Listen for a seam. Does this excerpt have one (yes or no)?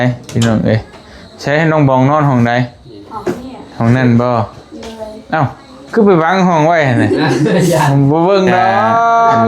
no